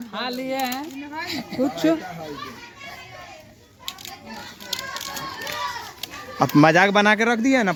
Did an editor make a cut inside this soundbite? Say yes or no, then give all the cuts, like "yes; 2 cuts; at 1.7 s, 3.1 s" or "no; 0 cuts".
no; 0 cuts